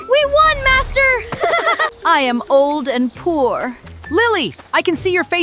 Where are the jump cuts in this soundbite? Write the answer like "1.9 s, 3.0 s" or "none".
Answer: 1.9 s, 3.9 s